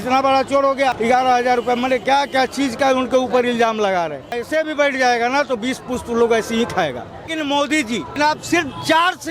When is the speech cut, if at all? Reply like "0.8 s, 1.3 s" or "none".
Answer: 0.9 s, 4.4 s, 7.3 s, 8.1 s